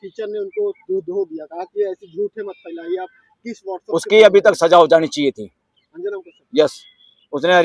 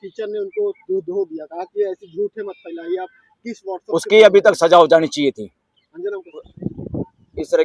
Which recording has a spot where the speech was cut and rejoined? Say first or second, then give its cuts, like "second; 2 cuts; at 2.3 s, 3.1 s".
second; 1 cut; at 6.4 s